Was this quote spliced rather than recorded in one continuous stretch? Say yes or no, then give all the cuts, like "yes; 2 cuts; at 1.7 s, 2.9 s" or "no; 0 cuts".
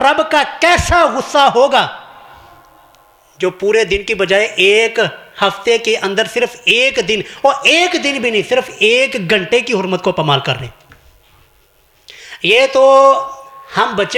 no; 0 cuts